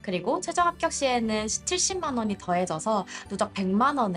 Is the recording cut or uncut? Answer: uncut